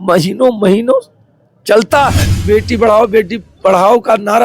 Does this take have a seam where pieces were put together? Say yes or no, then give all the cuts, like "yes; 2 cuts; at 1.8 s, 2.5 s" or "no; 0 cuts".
yes; 1 cut; at 2.3 s